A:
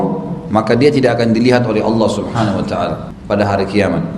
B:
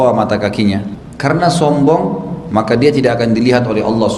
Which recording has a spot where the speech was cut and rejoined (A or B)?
A